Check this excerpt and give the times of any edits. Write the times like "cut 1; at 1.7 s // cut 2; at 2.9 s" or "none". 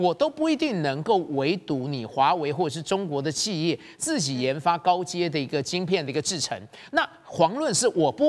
none